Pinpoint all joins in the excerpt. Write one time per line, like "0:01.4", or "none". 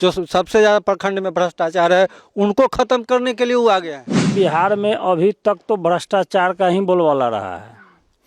0:04.3